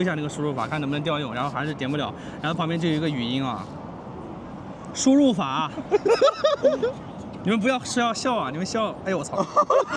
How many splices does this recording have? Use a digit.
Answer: 0